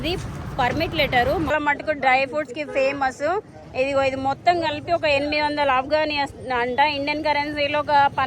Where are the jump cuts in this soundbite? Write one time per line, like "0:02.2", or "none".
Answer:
0:01.5